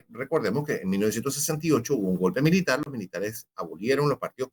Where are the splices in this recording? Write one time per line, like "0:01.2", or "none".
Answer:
none